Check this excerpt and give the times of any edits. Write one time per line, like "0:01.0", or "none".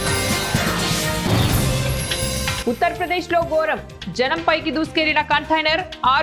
none